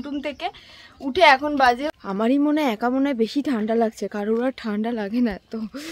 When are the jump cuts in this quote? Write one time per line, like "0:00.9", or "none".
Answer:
0:01.9